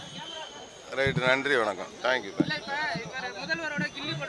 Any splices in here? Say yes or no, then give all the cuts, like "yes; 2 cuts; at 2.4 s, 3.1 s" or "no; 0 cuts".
no; 0 cuts